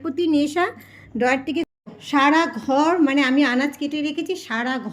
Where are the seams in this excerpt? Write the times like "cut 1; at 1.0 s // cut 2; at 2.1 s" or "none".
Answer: cut 1; at 1.7 s